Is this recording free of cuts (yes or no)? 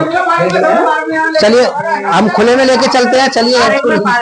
yes